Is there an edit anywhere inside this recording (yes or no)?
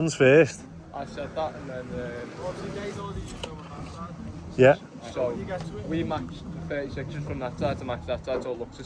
no